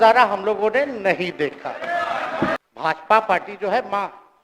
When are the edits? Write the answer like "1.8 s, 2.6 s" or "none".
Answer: 2.6 s